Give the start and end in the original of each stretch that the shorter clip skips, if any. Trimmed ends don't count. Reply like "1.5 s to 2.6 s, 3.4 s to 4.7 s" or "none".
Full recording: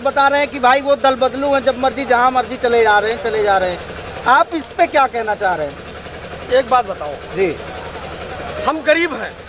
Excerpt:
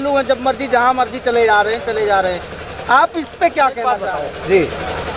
5.4 s to 6.9 s